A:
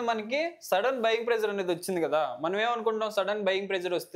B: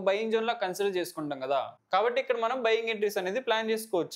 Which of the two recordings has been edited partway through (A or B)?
B